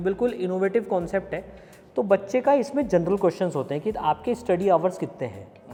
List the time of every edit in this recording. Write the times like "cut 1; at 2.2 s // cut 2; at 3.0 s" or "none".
none